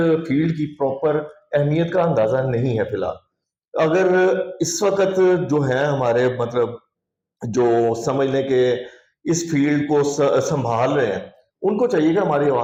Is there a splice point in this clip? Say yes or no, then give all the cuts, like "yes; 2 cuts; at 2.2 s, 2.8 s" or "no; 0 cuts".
no; 0 cuts